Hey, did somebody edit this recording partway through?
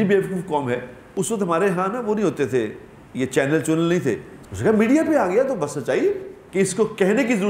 yes; 3 cuts; at 1.0 s, 4.3 s, 6.3 s

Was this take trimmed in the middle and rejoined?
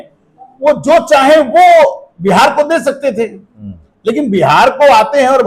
no; 0 cuts

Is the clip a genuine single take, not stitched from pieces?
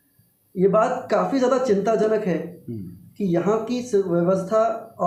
yes; 0 cuts

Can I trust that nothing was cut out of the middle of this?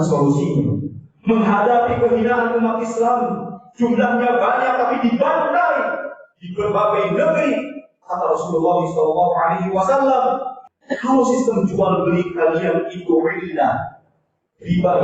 no; 1 cut; at 10.6 s

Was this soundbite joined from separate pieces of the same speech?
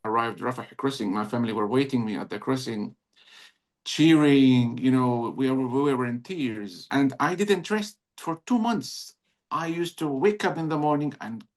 yes; 1 cut; at 6.9 s

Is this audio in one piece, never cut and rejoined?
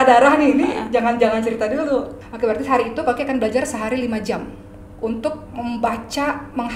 no; 1 cut; at 2.2 s

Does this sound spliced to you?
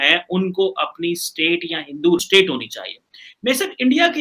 no; 0 cuts

